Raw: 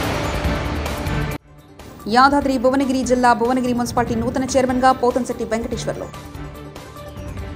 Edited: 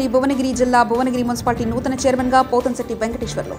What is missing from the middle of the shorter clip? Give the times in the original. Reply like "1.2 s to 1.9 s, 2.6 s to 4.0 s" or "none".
none